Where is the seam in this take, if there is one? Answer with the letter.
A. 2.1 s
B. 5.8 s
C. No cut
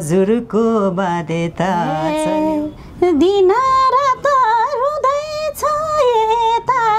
A